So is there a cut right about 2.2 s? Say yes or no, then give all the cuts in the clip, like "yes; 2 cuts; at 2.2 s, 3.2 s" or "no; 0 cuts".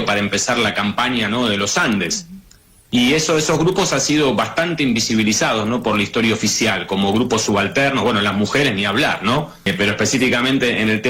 no; 1 cut; at 9.6 s